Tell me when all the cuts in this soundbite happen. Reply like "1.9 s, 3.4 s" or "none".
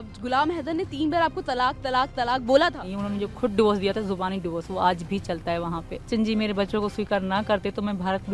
2.9 s, 6.1 s